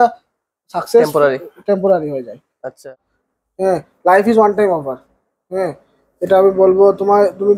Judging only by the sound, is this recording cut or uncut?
cut